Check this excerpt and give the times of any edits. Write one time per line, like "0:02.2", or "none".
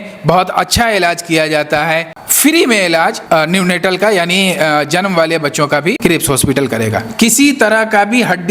0:02.1
0:03.2
0:06.0
0:07.0